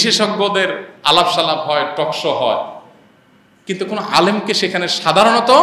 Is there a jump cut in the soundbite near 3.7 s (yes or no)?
no